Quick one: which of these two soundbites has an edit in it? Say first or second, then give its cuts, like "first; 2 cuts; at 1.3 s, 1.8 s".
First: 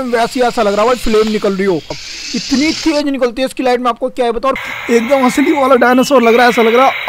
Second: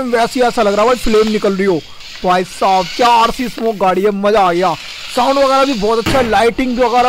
first; 2 cuts; at 2.1 s, 4.6 s